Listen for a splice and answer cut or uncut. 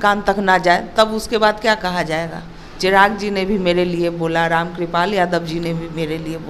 uncut